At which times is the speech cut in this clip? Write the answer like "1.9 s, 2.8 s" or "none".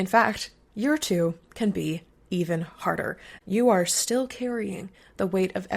3.3 s